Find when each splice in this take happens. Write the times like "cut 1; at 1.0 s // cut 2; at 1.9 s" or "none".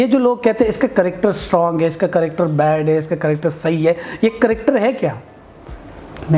none